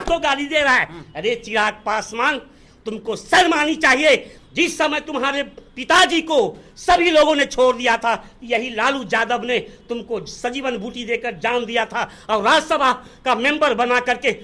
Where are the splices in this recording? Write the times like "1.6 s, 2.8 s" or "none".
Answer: 4.4 s

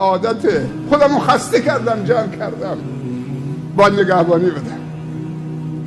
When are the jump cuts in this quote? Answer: none

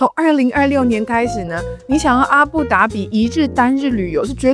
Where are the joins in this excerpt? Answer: none

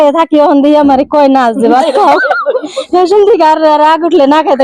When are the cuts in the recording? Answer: none

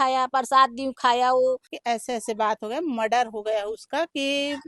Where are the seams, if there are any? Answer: 1.7 s

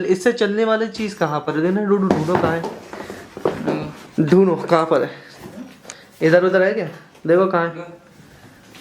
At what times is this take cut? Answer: 4.0 s

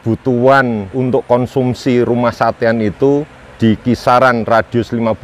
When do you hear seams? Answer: 0.9 s, 3.4 s

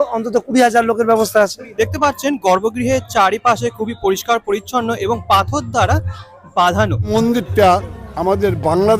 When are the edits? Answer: 1.6 s, 7.1 s

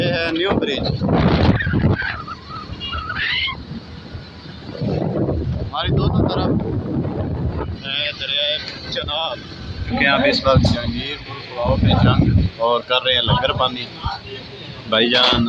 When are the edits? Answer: 9.8 s

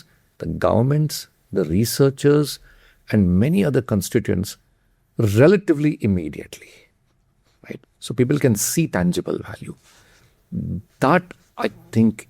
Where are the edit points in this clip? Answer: none

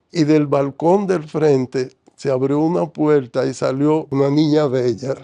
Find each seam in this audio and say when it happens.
none

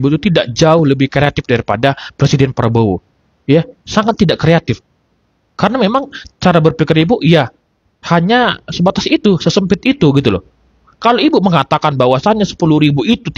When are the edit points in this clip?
none

